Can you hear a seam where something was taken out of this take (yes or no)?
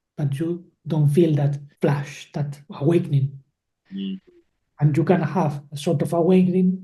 yes